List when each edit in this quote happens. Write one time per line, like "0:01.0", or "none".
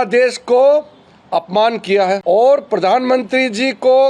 0:02.2